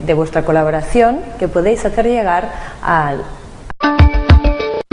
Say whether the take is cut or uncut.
uncut